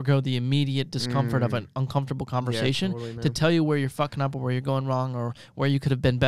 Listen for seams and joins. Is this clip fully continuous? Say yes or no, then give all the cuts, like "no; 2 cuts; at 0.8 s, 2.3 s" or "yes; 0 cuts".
yes; 0 cuts